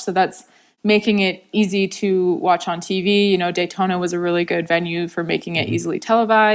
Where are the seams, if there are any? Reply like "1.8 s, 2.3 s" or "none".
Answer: 1.4 s